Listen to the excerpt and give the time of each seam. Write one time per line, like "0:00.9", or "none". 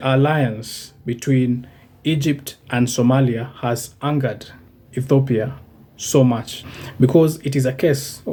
none